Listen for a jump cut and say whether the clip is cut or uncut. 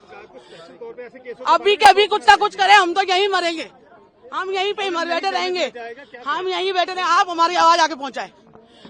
uncut